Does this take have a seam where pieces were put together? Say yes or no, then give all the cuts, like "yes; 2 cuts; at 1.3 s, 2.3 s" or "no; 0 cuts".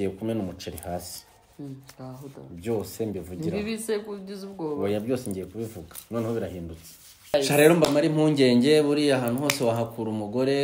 yes; 1 cut; at 7.3 s